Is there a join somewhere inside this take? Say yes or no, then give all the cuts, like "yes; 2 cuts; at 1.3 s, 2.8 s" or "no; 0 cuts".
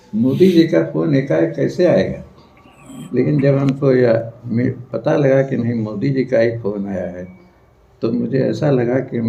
no; 0 cuts